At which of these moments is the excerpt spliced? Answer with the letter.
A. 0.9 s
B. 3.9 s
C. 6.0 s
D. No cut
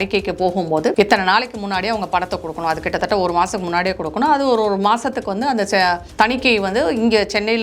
A